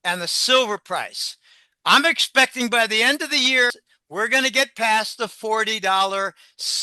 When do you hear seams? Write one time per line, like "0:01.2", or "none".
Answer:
0:03.8